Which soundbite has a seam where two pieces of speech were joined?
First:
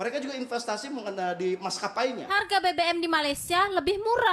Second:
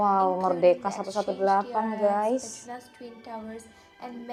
first; 1 cut; at 2.2 s

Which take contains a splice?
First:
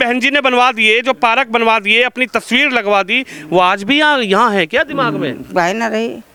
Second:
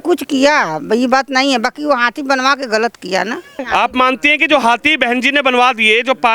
second; 1 cut; at 3.6 s

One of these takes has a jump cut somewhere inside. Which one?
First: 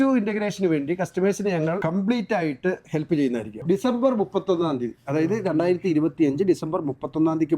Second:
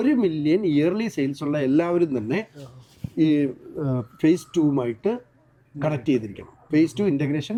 first; 1 cut; at 3.5 s

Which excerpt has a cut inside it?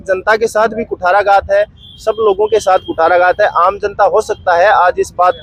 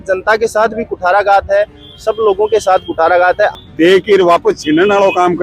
second; 1 cut; at 3.5 s

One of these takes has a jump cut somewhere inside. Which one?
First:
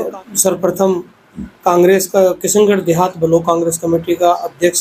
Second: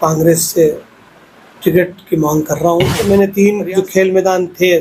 second; 1 cut; at 3.0 s

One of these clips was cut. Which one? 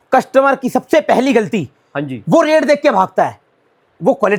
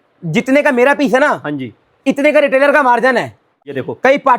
second; 1 cut; at 3.4 s

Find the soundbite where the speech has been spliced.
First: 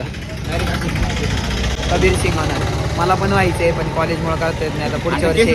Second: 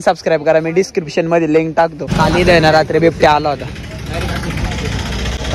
second; 1 cut; at 2.1 s

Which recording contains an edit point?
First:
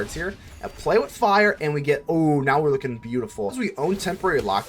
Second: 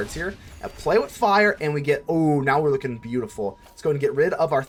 first; 1 cut; at 3.6 s

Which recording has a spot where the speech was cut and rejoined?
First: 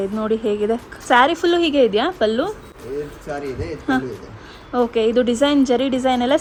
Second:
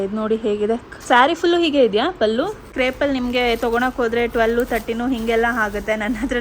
second; 1 cut; at 2.7 s

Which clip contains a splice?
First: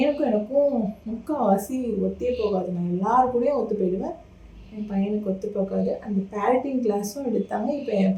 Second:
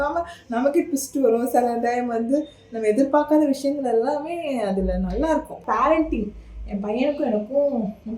second; 1 cut; at 5.6 s

